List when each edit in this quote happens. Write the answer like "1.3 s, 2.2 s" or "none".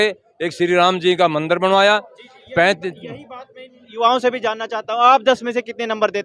none